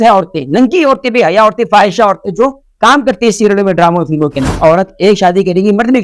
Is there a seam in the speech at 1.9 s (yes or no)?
no